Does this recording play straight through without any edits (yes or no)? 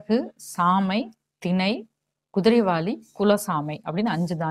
yes